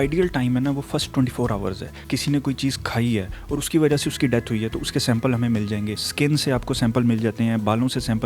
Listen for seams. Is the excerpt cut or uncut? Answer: cut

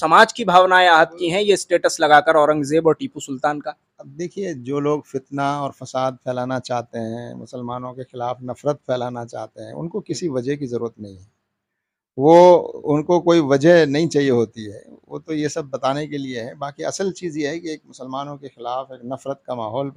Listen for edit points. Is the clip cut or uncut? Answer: uncut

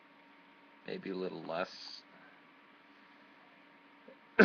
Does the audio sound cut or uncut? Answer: uncut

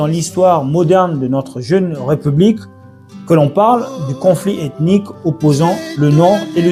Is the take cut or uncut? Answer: uncut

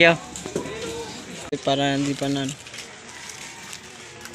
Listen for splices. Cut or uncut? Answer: cut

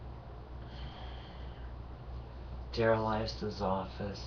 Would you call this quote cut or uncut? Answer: cut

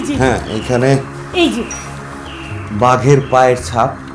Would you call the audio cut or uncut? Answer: uncut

